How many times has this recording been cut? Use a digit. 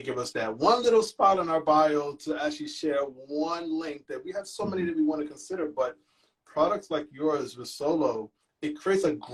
0